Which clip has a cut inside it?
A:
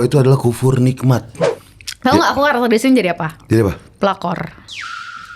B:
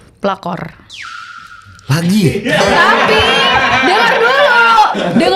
A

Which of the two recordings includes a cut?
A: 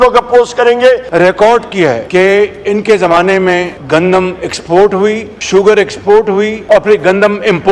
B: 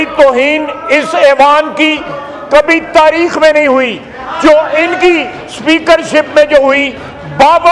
A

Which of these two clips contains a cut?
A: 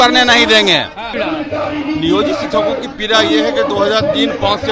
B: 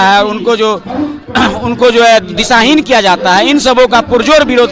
A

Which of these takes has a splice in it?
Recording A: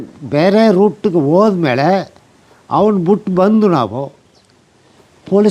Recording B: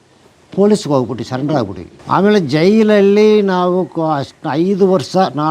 B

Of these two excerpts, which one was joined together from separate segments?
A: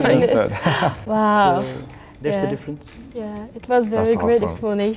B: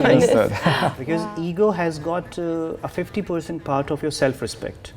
B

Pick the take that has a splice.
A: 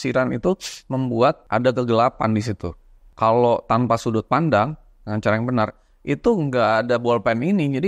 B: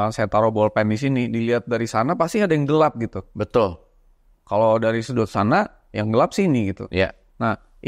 A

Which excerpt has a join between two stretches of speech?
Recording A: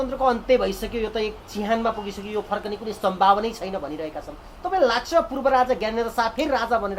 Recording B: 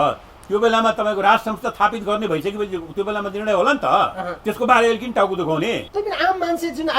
B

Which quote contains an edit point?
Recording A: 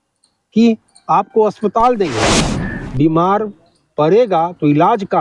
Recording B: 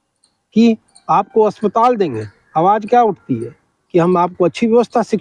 A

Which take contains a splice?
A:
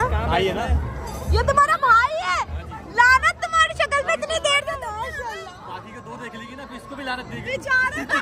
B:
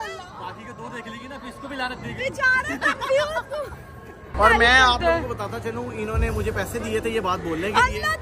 B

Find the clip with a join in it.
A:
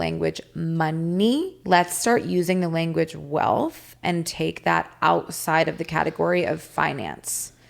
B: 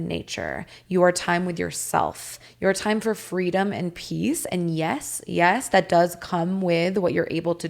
A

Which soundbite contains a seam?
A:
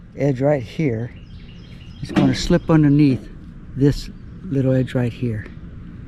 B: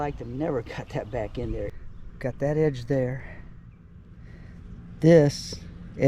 B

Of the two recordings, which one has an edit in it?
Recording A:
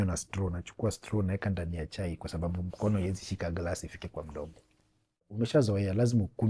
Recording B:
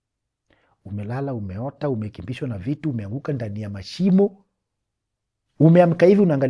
A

